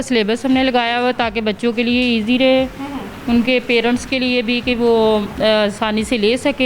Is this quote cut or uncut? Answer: uncut